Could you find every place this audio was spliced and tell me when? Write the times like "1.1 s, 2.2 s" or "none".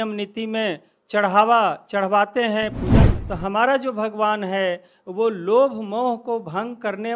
2.9 s